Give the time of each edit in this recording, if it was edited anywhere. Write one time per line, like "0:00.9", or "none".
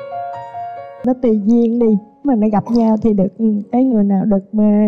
0:01.0